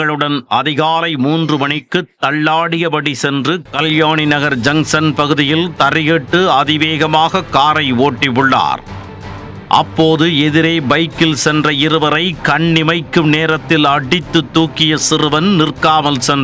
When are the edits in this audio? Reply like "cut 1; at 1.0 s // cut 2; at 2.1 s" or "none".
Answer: cut 1; at 3.6 s